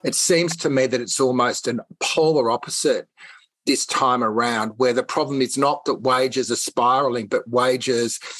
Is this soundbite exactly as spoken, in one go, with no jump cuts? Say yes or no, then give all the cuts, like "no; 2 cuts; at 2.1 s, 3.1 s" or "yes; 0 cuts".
yes; 0 cuts